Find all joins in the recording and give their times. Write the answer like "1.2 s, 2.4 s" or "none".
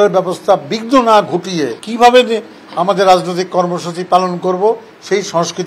1.8 s